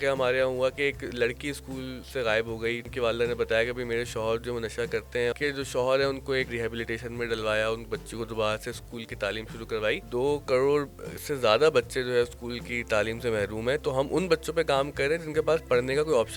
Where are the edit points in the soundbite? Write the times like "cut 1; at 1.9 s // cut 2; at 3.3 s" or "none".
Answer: cut 1; at 2.0 s // cut 2; at 2.9 s // cut 3; at 5.3 s // cut 4; at 6.5 s // cut 5; at 10.0 s